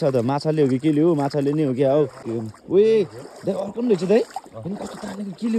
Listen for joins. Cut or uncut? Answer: cut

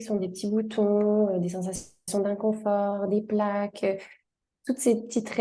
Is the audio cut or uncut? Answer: uncut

